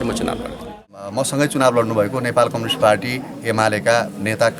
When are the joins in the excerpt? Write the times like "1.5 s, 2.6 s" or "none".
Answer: 0.9 s